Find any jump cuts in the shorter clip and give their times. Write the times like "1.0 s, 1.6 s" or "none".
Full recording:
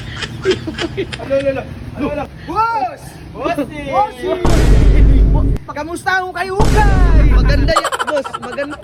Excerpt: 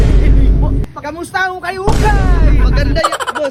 none